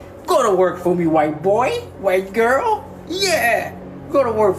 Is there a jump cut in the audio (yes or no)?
no